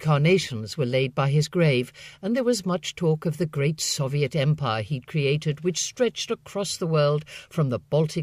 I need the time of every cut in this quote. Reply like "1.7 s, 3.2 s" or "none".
1.1 s